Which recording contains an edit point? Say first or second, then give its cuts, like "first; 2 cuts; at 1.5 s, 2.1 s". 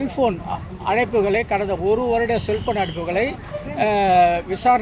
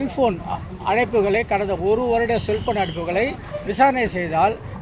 second; 1 cut; at 3.7 s